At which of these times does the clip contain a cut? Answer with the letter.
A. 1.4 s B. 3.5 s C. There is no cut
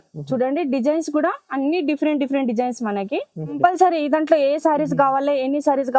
B